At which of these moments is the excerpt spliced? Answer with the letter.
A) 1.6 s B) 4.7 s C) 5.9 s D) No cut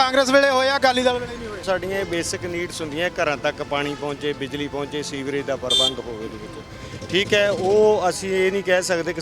A